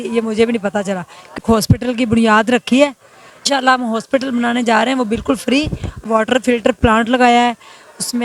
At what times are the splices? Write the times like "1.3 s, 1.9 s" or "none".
1.4 s, 3.4 s, 6.0 s